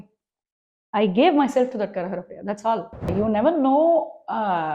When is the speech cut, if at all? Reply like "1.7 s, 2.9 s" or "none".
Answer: 3.1 s